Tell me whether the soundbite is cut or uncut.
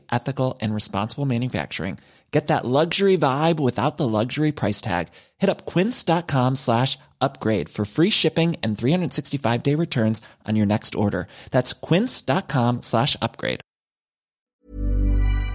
cut